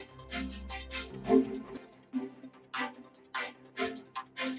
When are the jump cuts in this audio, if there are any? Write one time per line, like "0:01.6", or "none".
none

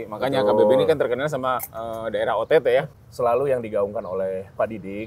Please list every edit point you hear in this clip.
0:02.9

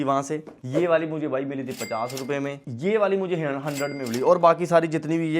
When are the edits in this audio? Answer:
0:02.6

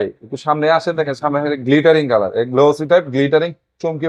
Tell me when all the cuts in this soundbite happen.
none

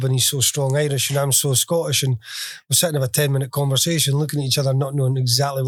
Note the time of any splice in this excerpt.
none

